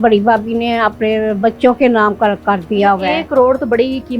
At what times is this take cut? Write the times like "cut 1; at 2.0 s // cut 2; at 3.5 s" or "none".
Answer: none